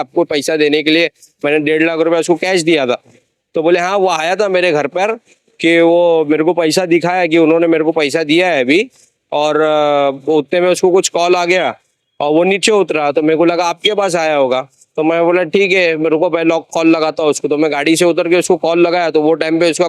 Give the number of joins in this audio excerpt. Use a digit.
0